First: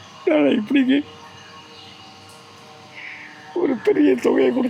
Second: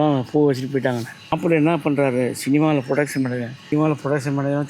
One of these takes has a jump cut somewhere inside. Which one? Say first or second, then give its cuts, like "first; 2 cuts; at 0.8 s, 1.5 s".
second; 2 cuts; at 1.4 s, 3.6 s